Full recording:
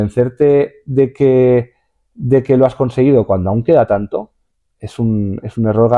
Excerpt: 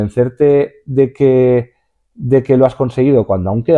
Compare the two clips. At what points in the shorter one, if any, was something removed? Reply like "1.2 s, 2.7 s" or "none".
none